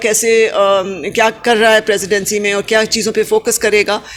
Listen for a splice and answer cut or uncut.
uncut